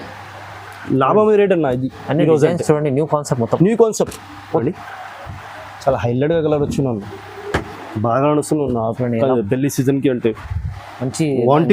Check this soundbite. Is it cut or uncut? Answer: cut